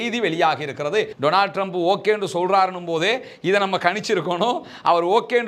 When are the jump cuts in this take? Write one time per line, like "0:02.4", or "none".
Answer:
0:01.1